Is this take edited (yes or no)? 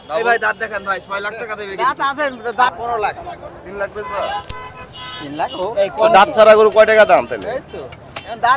yes